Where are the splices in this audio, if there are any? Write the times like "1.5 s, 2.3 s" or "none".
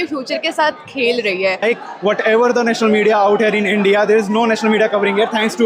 1.6 s